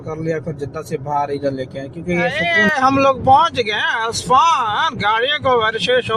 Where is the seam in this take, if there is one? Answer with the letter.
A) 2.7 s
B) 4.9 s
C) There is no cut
A